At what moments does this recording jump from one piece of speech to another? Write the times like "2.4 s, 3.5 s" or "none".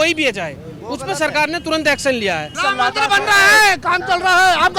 2.6 s